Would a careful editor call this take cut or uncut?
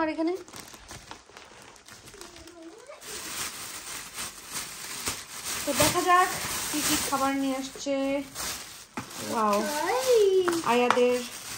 cut